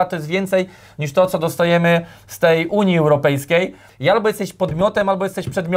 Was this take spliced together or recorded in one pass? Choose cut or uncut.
cut